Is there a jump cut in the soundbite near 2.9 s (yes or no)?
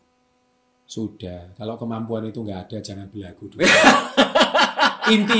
no